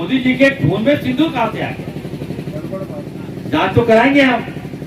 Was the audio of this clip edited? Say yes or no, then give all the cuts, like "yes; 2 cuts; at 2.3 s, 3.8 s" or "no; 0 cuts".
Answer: yes; 1 cut; at 3.2 s